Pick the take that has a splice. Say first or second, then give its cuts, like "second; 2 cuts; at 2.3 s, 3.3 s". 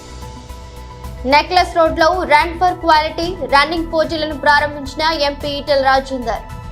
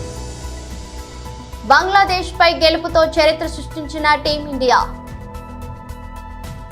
second; 1 cut; at 1.3 s